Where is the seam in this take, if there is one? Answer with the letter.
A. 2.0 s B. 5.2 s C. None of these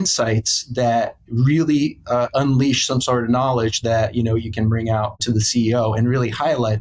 B